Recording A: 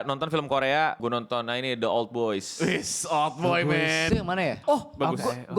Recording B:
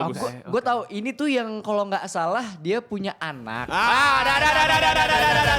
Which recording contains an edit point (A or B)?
A